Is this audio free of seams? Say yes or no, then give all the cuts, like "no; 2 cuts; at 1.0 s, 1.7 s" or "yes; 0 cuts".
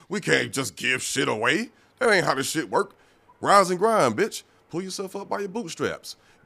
yes; 0 cuts